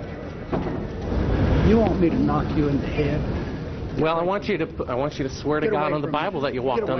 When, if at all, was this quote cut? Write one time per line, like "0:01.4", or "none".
0:01.0